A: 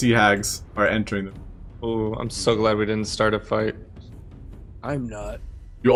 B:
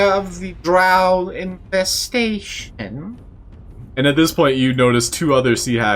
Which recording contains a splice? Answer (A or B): B